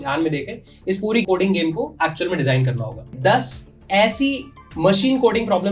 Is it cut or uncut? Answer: cut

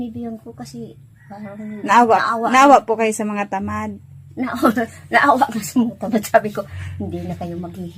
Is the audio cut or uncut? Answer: uncut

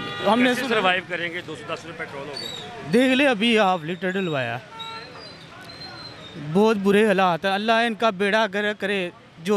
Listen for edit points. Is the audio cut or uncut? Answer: uncut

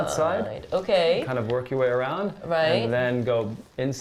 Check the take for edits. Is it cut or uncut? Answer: uncut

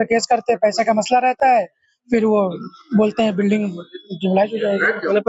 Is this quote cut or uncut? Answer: uncut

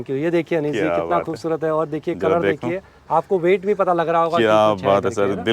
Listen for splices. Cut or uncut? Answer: uncut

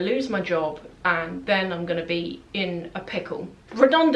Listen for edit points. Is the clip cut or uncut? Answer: uncut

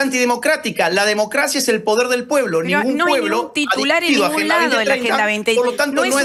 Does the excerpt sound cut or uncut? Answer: uncut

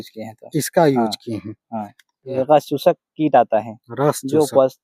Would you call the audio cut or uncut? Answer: cut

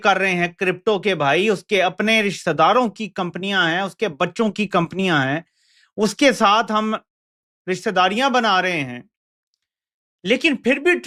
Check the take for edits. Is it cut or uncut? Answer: uncut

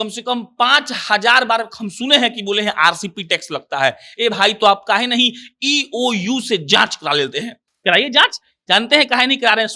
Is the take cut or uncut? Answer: uncut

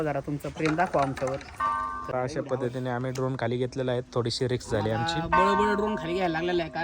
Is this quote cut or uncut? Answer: cut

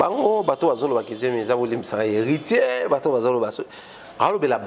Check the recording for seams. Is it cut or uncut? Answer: uncut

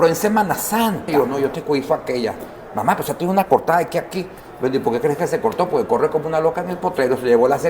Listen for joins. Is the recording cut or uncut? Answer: cut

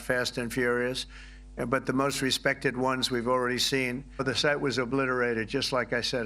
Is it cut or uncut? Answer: cut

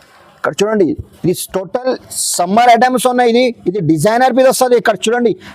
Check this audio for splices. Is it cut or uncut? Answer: uncut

